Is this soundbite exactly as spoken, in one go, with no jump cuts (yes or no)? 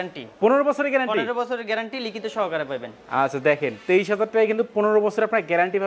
yes